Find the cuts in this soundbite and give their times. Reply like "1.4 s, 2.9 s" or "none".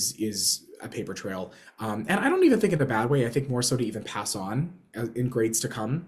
none